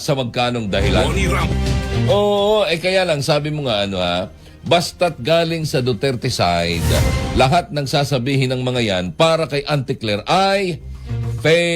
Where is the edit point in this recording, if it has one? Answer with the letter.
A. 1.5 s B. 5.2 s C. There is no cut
A